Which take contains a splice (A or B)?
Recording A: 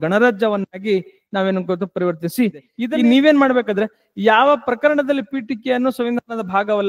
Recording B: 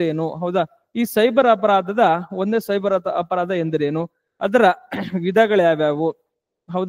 A